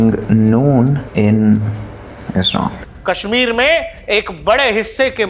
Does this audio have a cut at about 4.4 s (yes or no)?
no